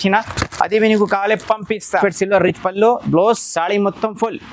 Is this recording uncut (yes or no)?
no